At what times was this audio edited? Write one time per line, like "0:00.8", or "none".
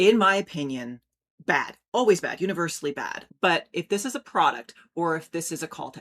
0:03.1